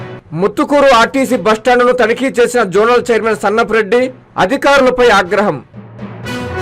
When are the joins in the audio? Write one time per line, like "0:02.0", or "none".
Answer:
0:05.7